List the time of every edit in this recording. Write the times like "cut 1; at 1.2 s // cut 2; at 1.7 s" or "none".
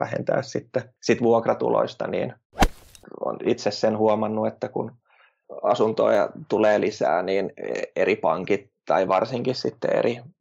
cut 1; at 2.8 s